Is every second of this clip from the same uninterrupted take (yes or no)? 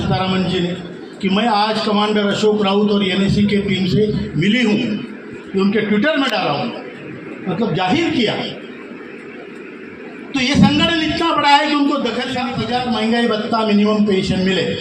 no